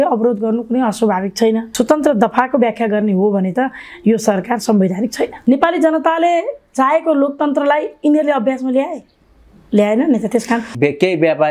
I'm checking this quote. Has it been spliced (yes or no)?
yes